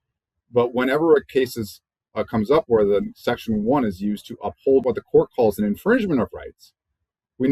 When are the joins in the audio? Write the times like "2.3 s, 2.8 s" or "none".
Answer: 4.8 s

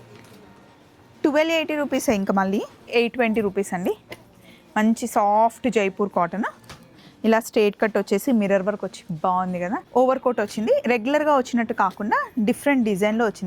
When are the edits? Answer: 2.9 s, 9.9 s

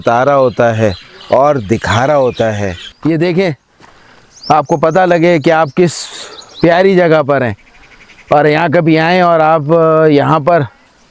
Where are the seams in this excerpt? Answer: 2.8 s

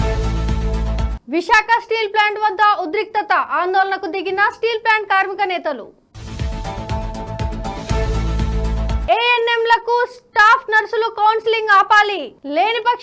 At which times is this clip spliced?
1.1 s

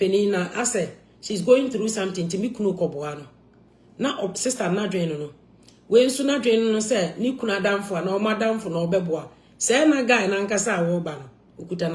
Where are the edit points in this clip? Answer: none

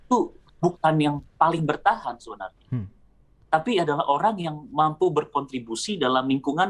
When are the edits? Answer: none

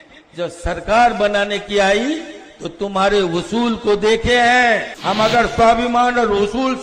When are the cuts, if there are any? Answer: 4.9 s

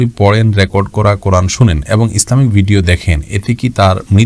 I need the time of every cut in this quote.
none

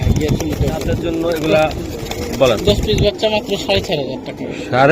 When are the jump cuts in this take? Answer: 1.0 s

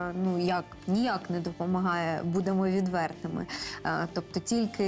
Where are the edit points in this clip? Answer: none

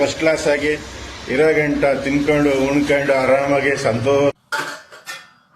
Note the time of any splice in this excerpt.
4.4 s

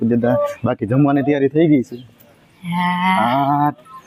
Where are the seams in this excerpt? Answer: none

